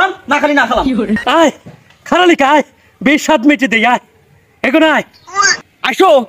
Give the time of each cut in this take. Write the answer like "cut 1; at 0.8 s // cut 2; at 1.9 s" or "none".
cut 1; at 1.2 s